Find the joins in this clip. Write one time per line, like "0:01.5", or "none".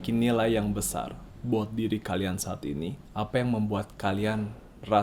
0:01.3
0:03.0

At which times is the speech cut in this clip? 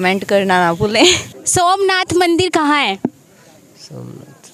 none

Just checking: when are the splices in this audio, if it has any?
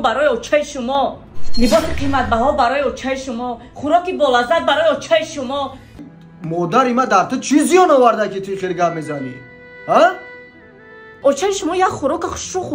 0:06.0
0:11.0

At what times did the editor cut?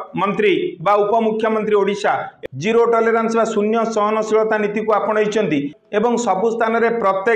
0:05.7

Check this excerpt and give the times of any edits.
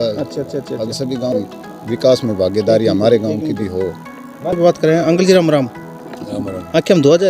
0:01.3
0:04.5

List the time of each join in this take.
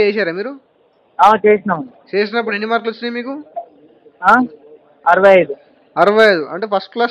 none

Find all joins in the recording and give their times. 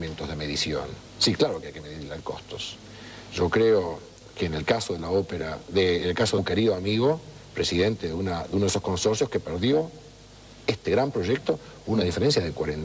none

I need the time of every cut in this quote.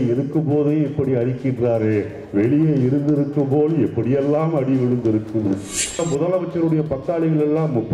0:06.0

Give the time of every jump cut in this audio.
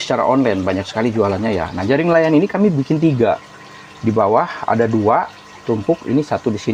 none

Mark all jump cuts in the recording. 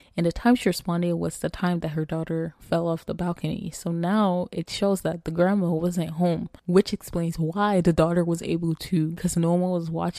0:06.5
0:09.2

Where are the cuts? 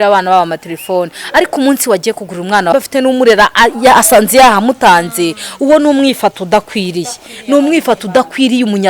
0:02.7

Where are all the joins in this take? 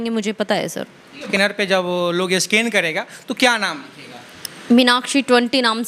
0:01.2

